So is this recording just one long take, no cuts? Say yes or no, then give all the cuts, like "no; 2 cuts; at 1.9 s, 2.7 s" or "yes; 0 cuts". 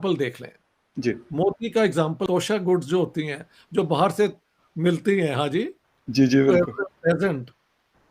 no; 1 cut; at 2.2 s